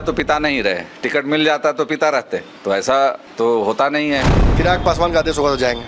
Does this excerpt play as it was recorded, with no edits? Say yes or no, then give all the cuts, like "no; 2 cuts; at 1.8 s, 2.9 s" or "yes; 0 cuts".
no; 3 cuts; at 2.5 s, 3.3 s, 4.3 s